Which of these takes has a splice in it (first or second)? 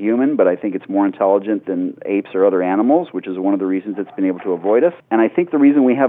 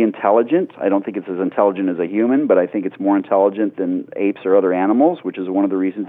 first